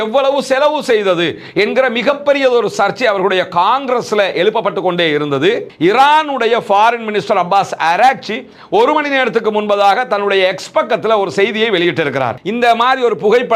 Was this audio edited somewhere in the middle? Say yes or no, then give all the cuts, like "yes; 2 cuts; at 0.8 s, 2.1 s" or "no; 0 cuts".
yes; 2 cuts; at 5.6 s, 12.3 s